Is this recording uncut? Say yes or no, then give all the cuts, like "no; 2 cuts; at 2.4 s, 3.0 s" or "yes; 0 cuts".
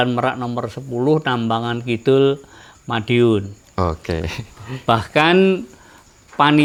yes; 0 cuts